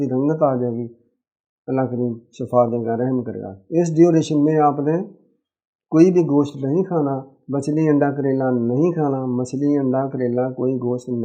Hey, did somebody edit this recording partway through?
no; 0 cuts

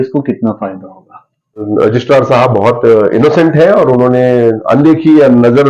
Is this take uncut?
no; 1 cut; at 1.7 s

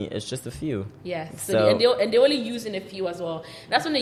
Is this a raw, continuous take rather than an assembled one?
yes; 0 cuts

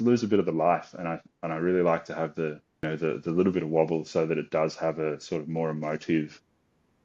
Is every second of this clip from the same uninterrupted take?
no; 1 cut; at 2.8 s

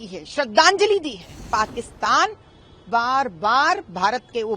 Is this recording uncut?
no; 1 cut; at 1.4 s

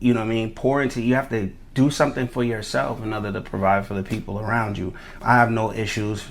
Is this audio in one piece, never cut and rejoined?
no; 1 cut; at 5.0 s

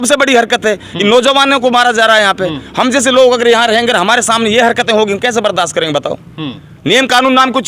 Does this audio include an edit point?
no; 0 cuts

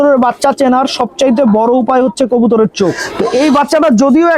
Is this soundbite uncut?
no; 1 cut; at 3.1 s

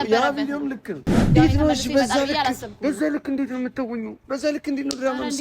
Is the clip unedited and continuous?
no; 1 cut; at 1.3 s

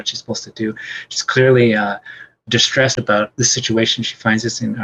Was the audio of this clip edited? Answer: yes; 1 cut; at 3.0 s

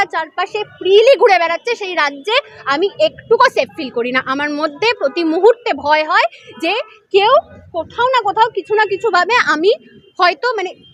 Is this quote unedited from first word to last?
yes; 0 cuts

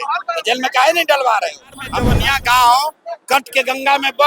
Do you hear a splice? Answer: yes; 1 cut; at 2.1 s

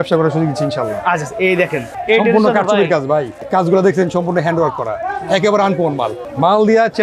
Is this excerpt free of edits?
yes; 0 cuts

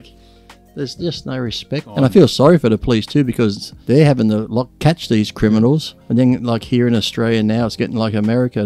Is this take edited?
yes; 4 cuts; at 1.9 s, 3.7 s, 4.7 s, 5.9 s

